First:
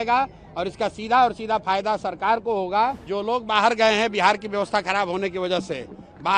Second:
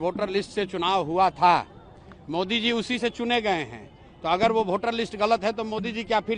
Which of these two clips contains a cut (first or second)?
first